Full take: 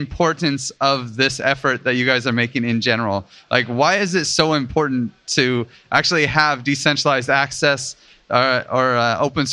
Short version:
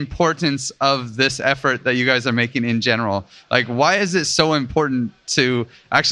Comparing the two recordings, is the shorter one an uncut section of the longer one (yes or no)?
yes